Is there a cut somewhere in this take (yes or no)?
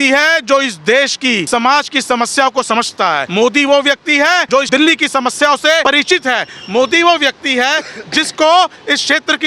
yes